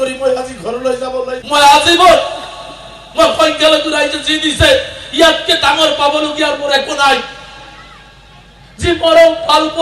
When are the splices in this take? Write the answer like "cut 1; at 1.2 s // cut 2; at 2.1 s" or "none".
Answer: cut 1; at 1.4 s

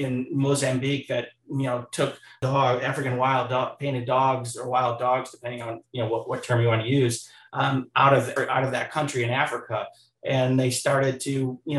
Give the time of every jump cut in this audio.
cut 1; at 2.4 s // cut 2; at 8.3 s

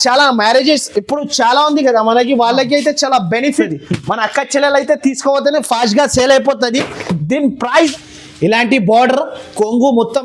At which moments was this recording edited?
cut 1; at 3.7 s // cut 2; at 7.7 s

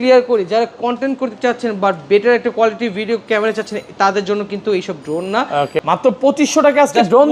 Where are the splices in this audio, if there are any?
cut 1; at 5.8 s

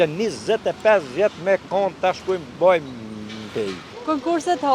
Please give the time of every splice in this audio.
cut 1; at 3.8 s

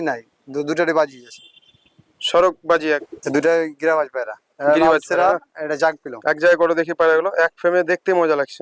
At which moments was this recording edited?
cut 1; at 2.8 s

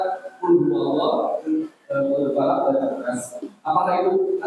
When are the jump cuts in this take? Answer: none

